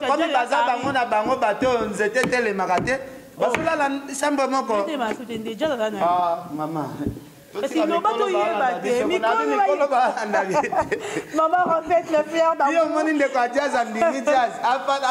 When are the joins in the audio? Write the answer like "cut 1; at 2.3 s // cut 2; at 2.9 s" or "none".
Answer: none